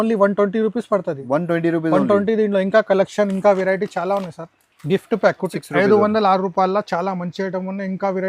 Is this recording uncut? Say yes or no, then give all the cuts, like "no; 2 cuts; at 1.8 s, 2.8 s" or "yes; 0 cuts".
no; 1 cut; at 5.5 s